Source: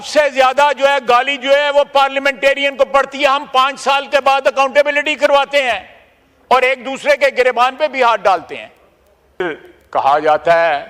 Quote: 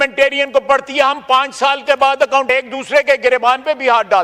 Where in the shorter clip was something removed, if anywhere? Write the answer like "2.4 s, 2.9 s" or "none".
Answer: 2.5 s